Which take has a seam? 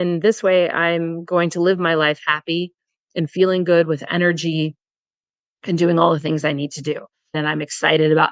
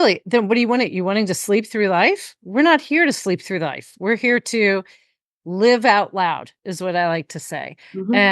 first; 1 cut; at 7.4 s

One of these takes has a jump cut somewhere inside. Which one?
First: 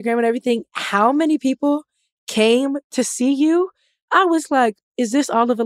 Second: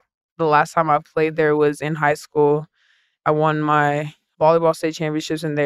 second; 2 cuts; at 3.1 s, 4.2 s

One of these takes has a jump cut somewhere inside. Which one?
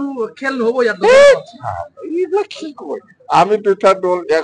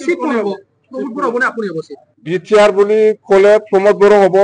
second; 1 cut; at 2.0 s

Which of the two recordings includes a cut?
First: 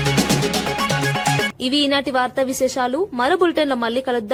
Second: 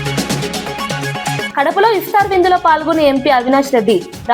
second; 1 cut; at 1.5 s

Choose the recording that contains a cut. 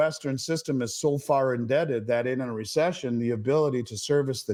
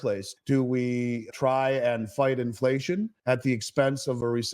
second; 1 cut; at 3.1 s

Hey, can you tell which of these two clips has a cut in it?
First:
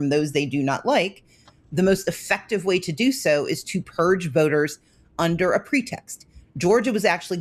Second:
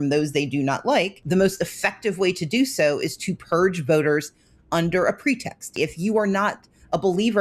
second; 2 cuts; at 1.2 s, 5.7 s

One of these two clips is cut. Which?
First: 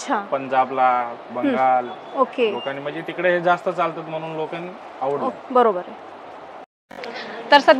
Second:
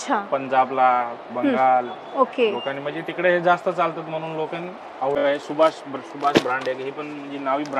second; 1 cut; at 5.2 s

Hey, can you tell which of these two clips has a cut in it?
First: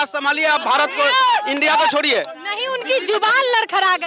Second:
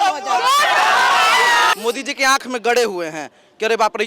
second; 1 cut; at 1.7 s

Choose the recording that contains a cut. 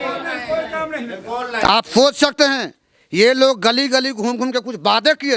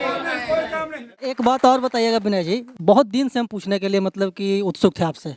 second; 1 cut; at 1.3 s

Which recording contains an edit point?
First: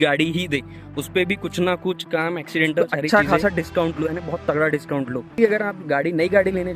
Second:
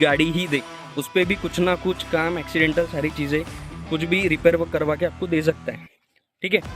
first; 2 cuts; at 3.0 s, 5.4 s

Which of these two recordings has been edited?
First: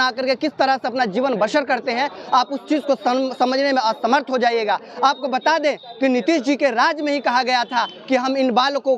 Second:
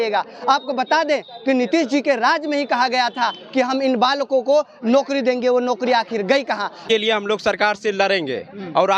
second; 1 cut; at 6.8 s

